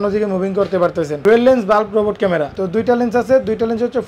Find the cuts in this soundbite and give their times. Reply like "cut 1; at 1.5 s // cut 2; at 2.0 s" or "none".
cut 1; at 1.2 s // cut 2; at 2.5 s